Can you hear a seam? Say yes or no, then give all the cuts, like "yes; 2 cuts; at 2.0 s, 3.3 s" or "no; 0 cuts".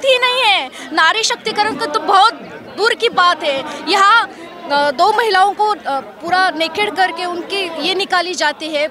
no; 0 cuts